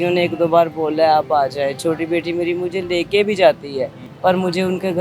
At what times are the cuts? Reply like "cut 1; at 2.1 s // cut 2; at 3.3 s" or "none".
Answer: cut 1; at 4.0 s